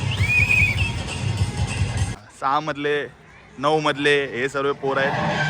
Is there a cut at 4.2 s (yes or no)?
no